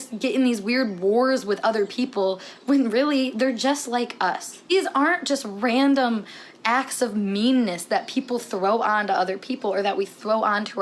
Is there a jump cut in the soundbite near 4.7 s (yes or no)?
yes